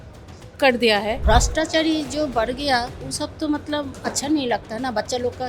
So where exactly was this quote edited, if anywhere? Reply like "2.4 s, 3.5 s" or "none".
1.2 s